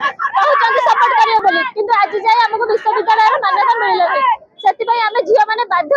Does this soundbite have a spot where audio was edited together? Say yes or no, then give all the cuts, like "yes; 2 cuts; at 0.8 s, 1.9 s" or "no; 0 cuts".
no; 0 cuts